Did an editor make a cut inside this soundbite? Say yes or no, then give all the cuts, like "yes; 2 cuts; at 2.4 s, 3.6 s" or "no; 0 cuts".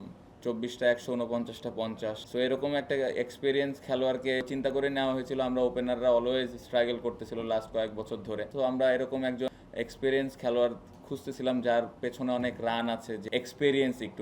yes; 5 cuts; at 2.2 s, 4.4 s, 8.5 s, 9.5 s, 13.2 s